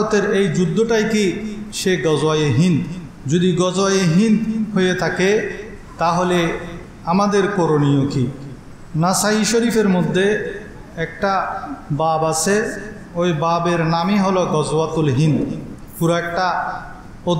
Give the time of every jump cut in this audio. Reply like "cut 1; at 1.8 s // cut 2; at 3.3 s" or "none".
none